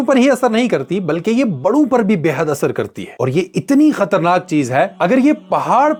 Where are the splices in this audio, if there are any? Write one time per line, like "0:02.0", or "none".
none